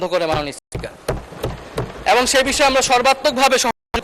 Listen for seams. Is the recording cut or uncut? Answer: uncut